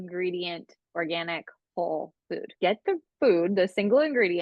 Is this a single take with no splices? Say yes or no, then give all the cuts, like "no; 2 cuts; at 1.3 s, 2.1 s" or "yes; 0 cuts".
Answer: no; 1 cut; at 2.5 s